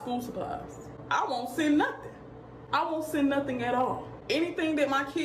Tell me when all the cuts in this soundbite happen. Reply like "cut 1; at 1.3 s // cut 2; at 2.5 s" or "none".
cut 1; at 0.9 s // cut 2; at 4.1 s